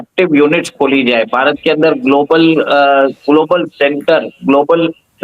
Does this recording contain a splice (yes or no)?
no